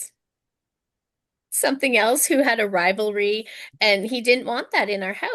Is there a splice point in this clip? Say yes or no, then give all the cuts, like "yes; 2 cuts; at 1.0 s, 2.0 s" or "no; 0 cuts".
no; 0 cuts